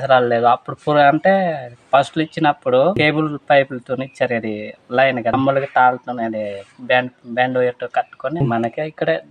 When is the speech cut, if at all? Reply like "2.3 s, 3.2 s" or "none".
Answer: 3.0 s, 5.3 s, 8.4 s